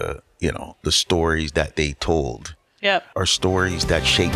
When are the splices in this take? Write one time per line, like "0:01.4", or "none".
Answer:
0:03.1